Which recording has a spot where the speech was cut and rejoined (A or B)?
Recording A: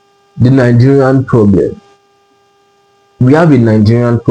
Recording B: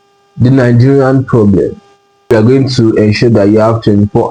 B